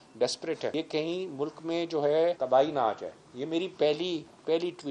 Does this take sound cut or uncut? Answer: cut